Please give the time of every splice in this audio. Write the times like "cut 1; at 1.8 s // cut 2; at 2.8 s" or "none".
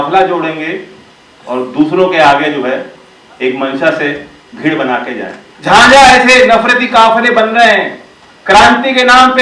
cut 1; at 5.4 s